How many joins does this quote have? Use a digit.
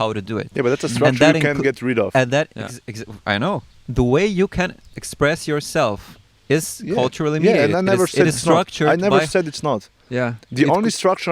1